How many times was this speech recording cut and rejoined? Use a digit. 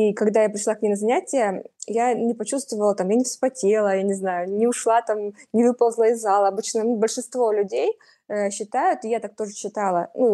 0